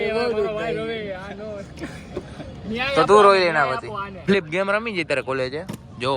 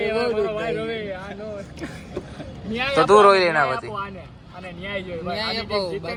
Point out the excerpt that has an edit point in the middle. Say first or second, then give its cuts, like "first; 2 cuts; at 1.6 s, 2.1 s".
first; 1 cut; at 4.3 s